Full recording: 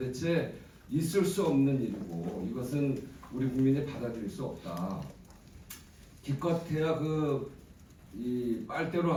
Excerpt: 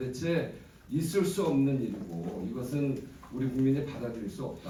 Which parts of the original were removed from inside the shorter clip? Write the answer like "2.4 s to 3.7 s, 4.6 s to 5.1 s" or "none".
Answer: none